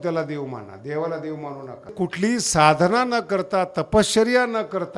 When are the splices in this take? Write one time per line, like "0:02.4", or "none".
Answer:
0:01.9